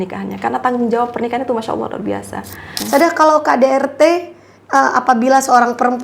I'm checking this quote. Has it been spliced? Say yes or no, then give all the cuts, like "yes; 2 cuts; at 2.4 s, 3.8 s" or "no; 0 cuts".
yes; 1 cut; at 2.7 s